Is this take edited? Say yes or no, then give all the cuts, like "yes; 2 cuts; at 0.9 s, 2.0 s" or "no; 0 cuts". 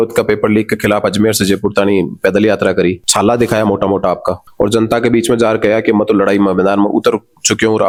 no; 0 cuts